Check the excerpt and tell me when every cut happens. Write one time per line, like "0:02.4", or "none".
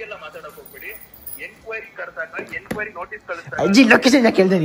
none